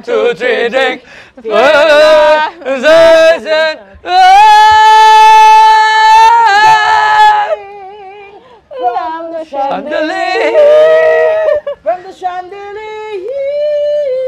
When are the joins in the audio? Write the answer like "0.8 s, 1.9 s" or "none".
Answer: none